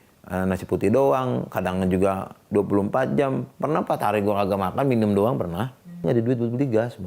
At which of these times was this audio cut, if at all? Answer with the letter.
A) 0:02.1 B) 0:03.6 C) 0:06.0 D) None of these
C